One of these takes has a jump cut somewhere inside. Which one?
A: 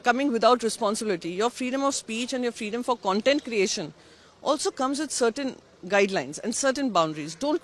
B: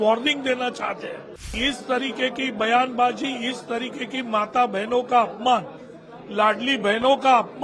B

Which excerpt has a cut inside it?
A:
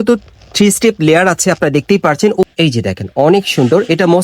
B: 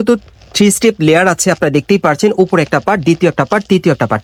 A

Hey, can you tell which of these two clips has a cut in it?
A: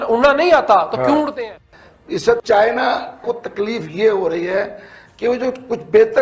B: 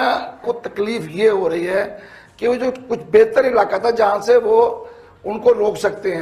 A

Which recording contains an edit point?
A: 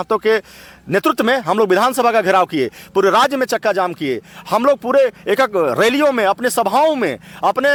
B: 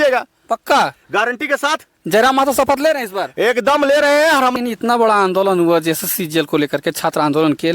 B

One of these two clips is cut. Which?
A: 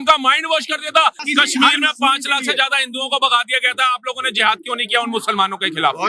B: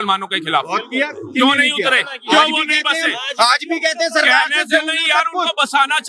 A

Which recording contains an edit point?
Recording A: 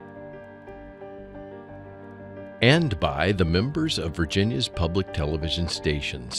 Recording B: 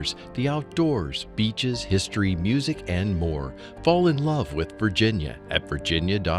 A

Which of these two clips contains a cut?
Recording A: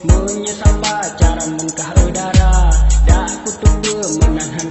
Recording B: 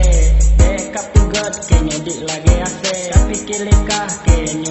B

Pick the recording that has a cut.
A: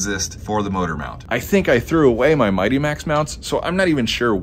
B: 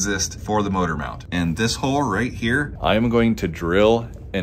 B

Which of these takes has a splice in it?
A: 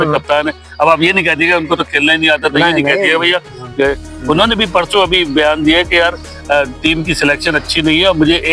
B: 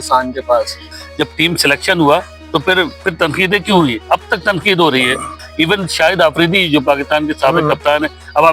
B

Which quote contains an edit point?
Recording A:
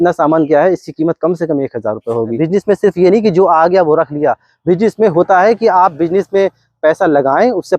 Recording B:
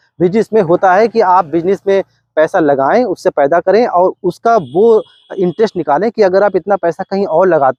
A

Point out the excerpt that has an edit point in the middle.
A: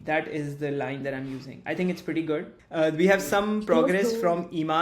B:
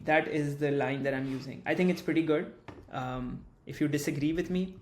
A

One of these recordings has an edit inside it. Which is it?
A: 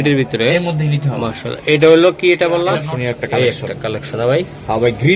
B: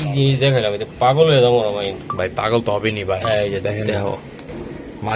A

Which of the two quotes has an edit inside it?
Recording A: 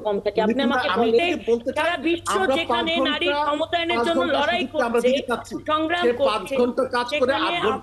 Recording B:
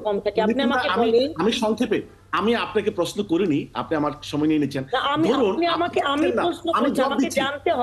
A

